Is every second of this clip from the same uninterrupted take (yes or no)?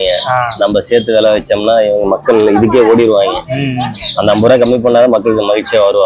yes